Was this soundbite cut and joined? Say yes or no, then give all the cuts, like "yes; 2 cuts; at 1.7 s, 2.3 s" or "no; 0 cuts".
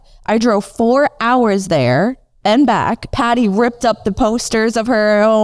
yes; 1 cut; at 3.1 s